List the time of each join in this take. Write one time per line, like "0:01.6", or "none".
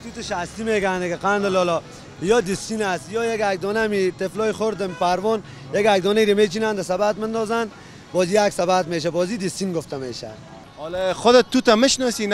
0:10.6